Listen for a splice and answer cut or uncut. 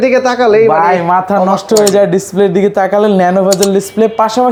uncut